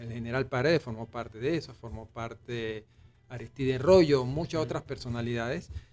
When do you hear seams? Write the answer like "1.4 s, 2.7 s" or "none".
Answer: none